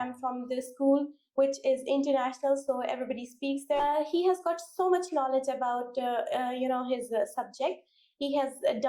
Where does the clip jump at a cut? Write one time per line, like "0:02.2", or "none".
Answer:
0:03.8